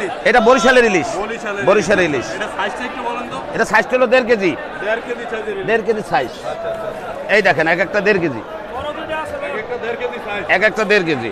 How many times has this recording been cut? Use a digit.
0